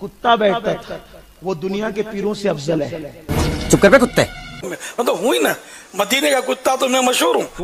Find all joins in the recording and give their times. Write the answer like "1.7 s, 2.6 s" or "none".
4.7 s

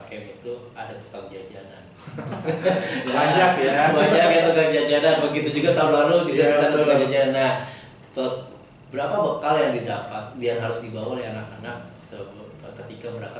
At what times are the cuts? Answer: none

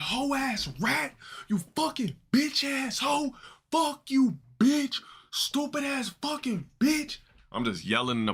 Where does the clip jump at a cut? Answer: none

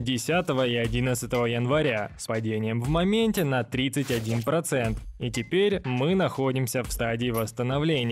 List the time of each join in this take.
none

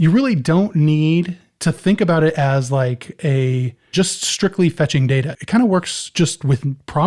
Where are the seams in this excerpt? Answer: 1.4 s, 5.3 s

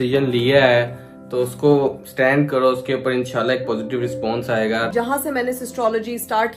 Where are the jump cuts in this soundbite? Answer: 4.9 s

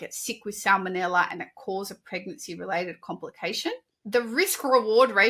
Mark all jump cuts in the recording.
3.9 s

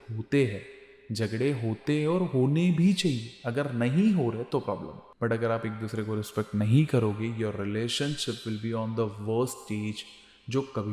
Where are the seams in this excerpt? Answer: 5.0 s

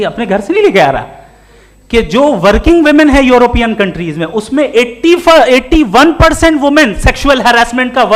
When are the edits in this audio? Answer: none

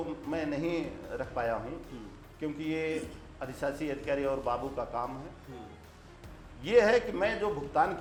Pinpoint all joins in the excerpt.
none

